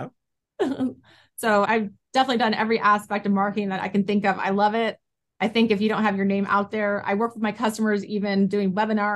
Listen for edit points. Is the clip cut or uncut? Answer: cut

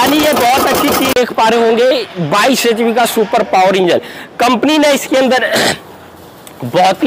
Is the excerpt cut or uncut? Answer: cut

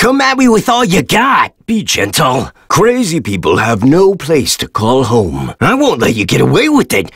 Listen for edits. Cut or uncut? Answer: uncut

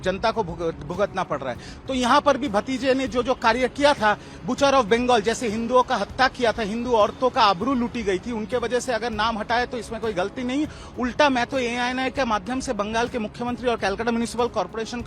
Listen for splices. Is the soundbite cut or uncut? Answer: uncut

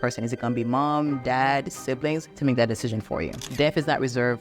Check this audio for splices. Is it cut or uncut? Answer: cut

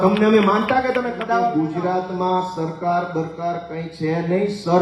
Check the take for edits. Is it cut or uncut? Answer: cut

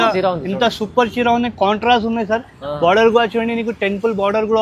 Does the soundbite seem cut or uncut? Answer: uncut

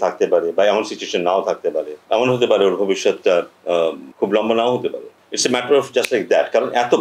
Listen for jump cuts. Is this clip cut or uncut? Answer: cut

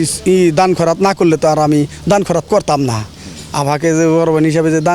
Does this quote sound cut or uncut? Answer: uncut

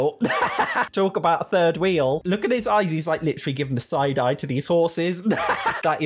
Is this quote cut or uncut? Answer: uncut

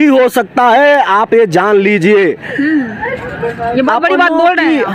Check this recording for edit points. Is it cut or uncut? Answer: uncut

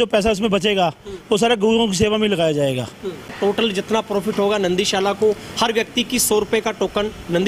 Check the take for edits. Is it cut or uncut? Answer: cut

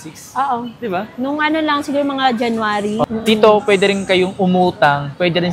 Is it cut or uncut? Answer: cut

